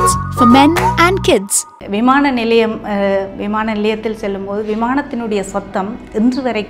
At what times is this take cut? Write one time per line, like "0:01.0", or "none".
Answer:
0:01.7